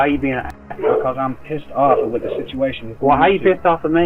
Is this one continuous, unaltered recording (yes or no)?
yes